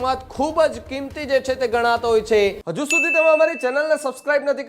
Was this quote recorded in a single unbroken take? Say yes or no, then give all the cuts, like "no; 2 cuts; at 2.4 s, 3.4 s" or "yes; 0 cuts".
no; 1 cut; at 2.6 s